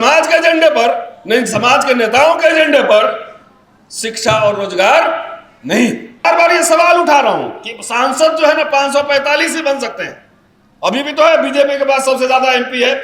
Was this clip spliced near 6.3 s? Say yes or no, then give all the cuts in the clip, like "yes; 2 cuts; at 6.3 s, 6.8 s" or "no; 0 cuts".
yes; 1 cut; at 6.3 s